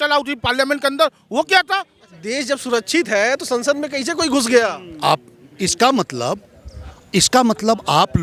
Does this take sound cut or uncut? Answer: cut